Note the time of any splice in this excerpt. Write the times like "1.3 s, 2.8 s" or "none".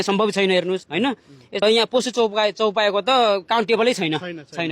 1.6 s

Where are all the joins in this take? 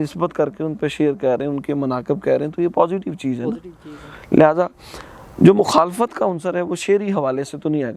none

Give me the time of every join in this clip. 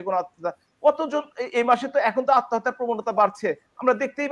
none

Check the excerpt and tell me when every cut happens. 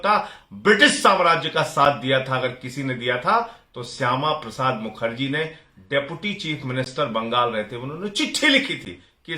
none

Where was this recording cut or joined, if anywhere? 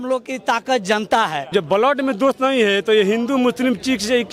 1.5 s

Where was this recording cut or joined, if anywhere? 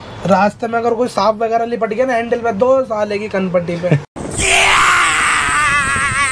none

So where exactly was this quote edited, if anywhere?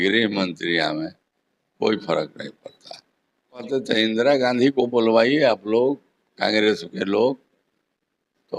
3.7 s

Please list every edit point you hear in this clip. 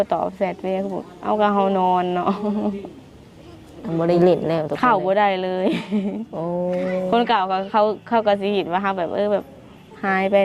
4.2 s

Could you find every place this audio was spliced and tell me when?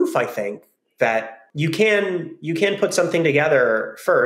1.4 s

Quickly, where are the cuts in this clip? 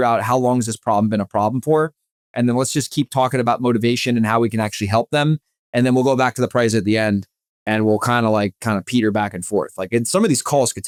none

